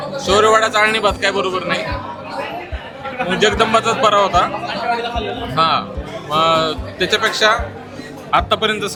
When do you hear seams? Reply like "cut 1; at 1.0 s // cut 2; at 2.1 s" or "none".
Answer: none